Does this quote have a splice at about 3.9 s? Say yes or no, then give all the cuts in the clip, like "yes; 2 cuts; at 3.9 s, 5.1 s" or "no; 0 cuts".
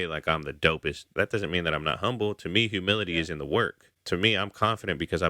yes; 2 cuts; at 1.1 s, 3.9 s